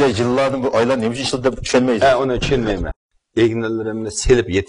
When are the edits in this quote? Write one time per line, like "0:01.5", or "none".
0:02.9